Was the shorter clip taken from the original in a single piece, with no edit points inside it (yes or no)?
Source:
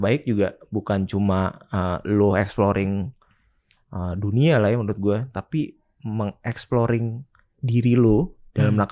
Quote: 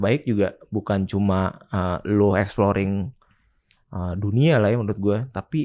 yes